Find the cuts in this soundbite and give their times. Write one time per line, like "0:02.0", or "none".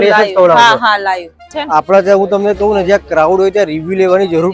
0:01.5